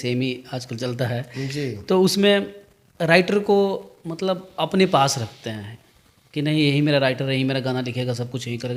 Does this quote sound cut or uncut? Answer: uncut